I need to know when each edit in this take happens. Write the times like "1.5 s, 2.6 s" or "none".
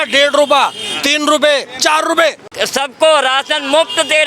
2.5 s